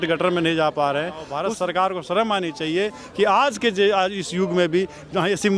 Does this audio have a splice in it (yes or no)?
yes